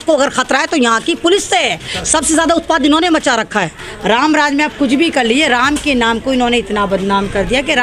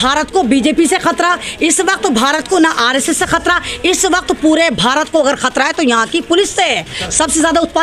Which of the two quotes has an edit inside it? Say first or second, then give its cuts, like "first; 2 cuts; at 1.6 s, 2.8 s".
first; 1 cut; at 3.8 s